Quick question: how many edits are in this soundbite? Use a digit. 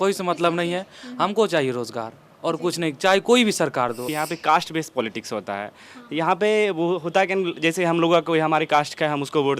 1